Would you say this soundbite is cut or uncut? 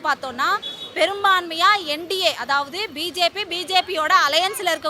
uncut